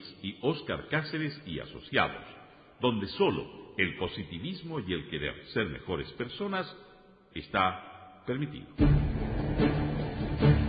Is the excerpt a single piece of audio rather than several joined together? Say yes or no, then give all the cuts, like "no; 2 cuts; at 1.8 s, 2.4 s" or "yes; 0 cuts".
no; 1 cut; at 8.7 s